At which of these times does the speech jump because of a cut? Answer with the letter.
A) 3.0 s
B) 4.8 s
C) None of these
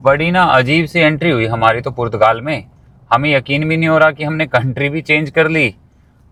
C